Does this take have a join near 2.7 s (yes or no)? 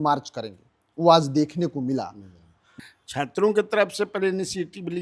yes